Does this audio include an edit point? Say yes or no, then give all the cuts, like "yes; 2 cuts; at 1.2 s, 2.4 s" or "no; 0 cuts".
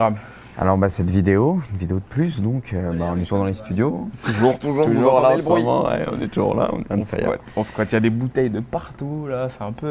yes; 1 cut; at 2.9 s